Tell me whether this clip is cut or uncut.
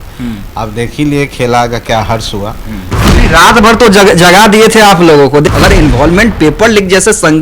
cut